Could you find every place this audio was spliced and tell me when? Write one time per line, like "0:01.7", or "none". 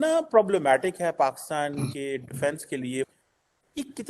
0:03.1